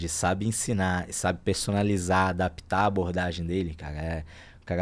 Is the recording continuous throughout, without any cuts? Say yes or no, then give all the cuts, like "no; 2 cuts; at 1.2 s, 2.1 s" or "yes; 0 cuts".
yes; 0 cuts